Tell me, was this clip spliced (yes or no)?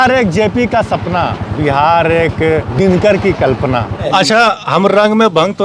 yes